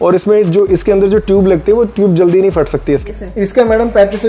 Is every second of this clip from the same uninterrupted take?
no; 1 cut; at 3.1 s

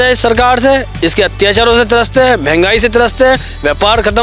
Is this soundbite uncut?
yes; 0 cuts

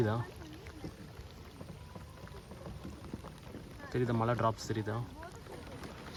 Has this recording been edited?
no; 0 cuts

